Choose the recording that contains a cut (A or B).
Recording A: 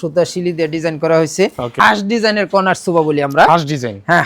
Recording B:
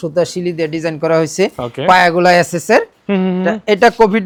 A